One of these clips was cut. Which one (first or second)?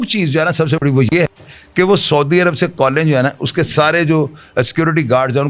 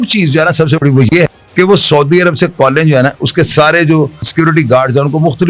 second